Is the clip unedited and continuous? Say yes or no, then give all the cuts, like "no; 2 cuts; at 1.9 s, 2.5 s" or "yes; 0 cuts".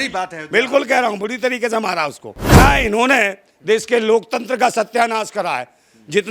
no; 1 cut; at 2.4 s